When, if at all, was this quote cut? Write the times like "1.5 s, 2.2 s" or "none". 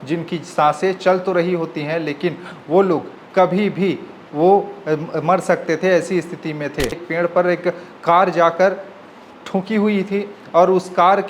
7.0 s